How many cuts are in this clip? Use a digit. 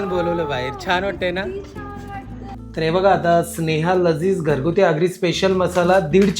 1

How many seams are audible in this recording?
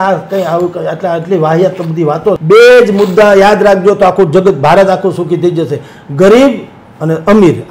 1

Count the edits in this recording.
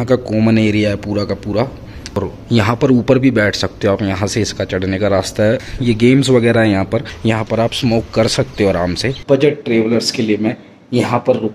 4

